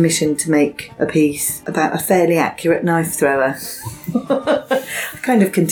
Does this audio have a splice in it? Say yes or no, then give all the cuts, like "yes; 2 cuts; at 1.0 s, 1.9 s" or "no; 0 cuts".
yes; 2 cuts; at 0.8 s, 1.6 s